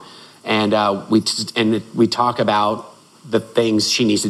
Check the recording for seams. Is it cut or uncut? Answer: uncut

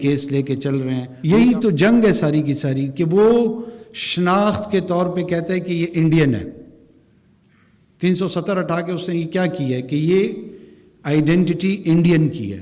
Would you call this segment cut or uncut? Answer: cut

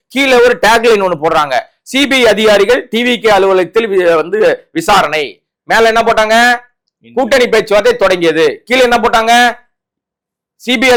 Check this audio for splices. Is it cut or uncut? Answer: uncut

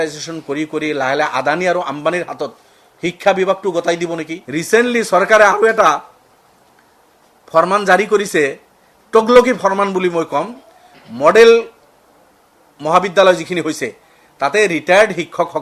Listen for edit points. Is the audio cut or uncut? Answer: cut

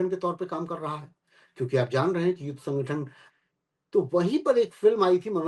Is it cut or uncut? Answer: cut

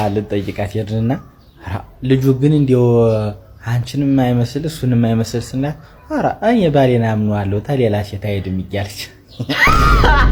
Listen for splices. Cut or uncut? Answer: uncut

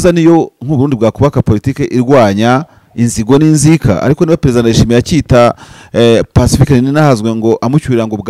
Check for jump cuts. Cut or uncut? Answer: uncut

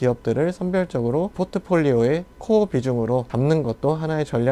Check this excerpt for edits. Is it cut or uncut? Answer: cut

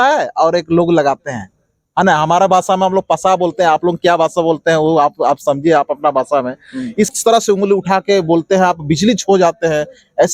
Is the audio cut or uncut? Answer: cut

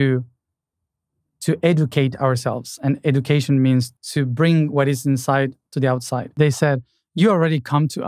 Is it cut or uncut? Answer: cut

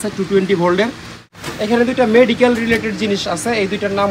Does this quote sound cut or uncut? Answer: cut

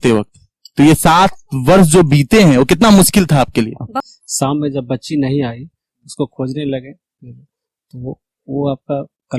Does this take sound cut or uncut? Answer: cut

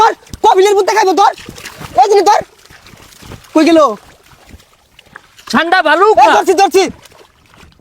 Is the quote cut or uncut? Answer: uncut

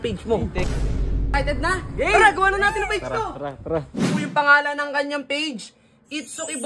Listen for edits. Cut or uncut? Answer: cut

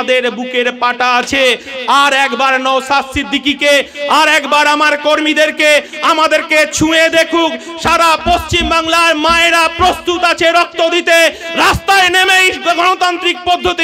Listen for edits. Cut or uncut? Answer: uncut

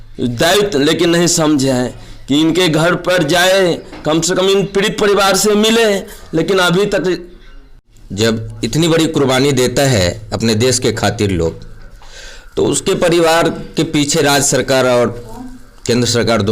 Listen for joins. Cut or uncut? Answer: cut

